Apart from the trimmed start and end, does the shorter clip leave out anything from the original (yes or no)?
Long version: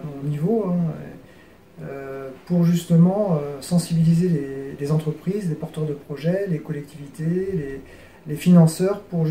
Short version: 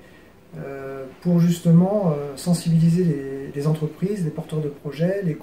no